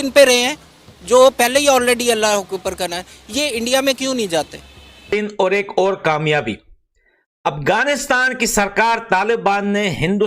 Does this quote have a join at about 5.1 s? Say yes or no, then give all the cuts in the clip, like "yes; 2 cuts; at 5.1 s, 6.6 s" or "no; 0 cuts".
yes; 1 cut; at 5.1 s